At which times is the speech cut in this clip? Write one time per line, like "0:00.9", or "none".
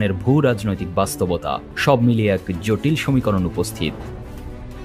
0:01.7